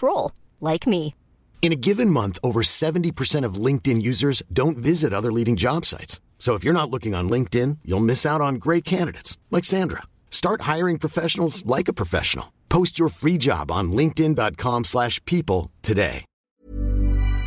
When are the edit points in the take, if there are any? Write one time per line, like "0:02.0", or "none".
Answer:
0:16.5